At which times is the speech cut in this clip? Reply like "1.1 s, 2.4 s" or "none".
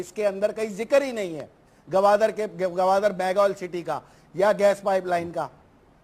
2.1 s

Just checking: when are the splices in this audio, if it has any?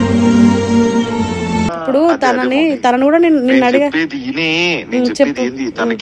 1.7 s

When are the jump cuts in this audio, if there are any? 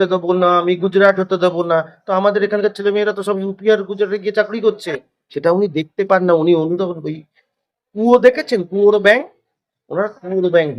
none

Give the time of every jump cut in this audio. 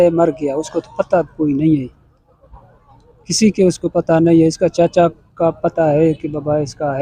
none

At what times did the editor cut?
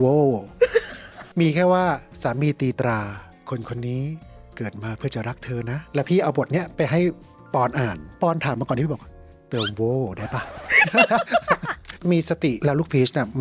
5.8 s, 8.0 s, 11.9 s

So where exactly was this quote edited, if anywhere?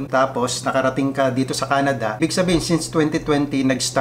2.2 s

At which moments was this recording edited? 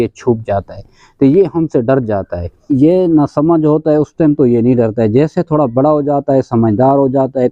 2.6 s

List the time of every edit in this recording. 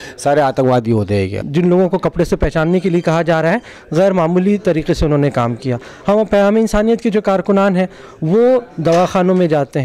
1.4 s

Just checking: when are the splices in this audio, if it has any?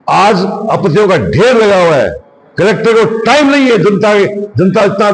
none

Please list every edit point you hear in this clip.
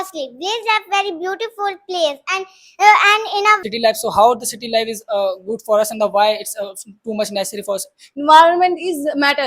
3.6 s, 8.1 s

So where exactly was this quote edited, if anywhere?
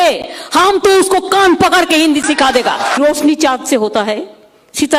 3.0 s

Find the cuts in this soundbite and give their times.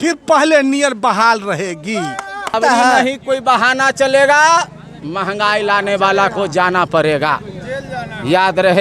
2.4 s

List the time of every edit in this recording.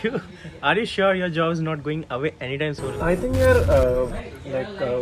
none

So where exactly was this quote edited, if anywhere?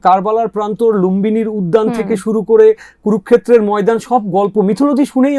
none

